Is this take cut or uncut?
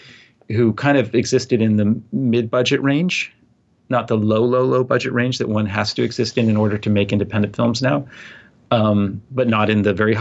uncut